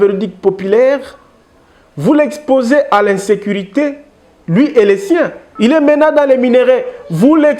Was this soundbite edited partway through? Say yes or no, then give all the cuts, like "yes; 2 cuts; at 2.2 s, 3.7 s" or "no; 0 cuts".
yes; 1 cut; at 5.4 s